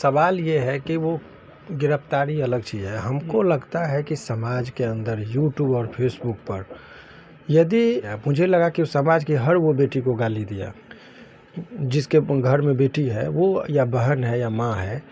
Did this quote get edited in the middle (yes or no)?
yes